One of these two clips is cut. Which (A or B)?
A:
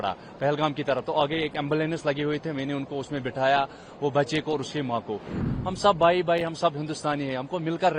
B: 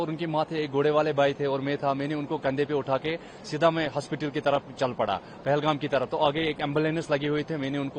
A